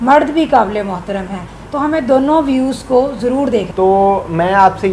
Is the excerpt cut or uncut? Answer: cut